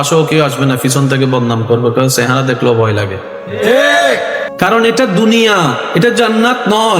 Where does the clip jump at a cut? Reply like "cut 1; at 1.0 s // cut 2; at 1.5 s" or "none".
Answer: cut 1; at 4.4 s